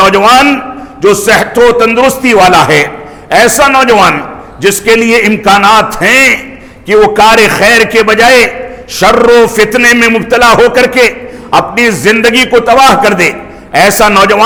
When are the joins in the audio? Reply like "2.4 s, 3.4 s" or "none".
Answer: none

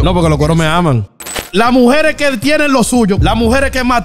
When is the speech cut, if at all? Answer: 1.4 s, 3.2 s

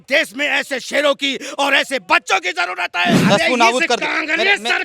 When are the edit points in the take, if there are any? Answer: 3.2 s

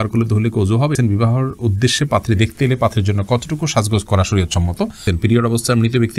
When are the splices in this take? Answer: 0.9 s, 5.1 s

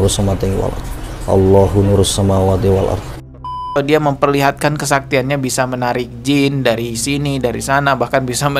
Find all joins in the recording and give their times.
3.6 s

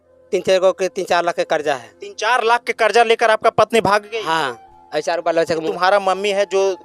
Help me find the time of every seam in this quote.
5.7 s

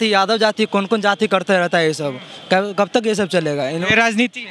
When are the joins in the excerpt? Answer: none

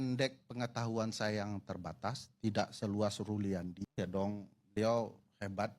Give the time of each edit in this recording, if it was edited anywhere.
3.8 s

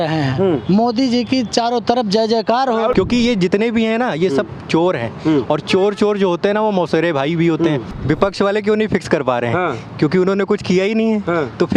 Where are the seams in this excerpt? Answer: 2.9 s, 7.9 s

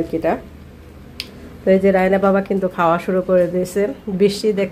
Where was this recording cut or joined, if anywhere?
none

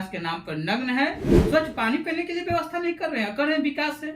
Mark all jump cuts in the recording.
1.3 s

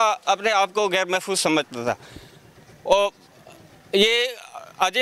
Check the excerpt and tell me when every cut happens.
none

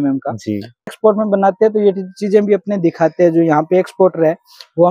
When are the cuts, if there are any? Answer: 0.9 s

